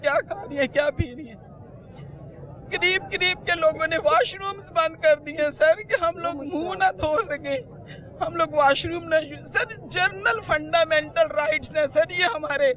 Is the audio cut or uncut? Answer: uncut